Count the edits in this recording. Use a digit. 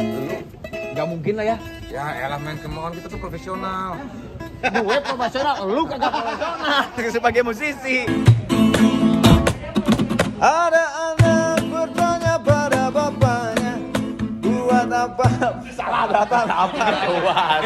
1